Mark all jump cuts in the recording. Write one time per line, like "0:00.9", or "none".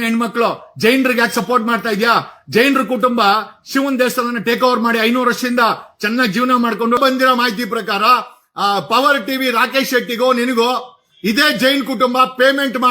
0:07.0